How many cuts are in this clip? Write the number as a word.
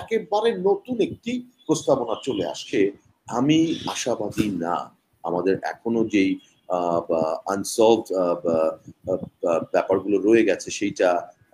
one